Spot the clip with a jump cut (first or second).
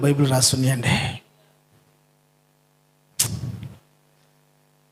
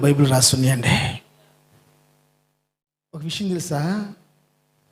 second